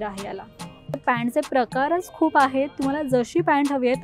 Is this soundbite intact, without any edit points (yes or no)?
no